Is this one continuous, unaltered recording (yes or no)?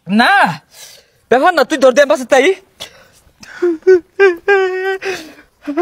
yes